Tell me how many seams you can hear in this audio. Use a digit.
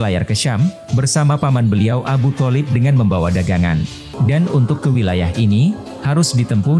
1